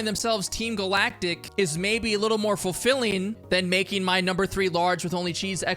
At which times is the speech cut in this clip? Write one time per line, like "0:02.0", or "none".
0:01.4
0:03.4